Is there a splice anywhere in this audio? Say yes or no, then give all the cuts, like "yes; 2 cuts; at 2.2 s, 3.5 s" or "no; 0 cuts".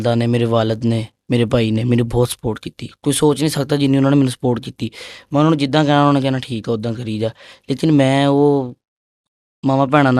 no; 0 cuts